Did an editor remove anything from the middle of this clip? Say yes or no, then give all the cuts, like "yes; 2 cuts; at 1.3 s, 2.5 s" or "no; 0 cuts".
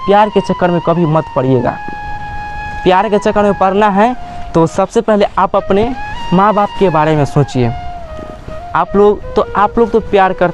no; 0 cuts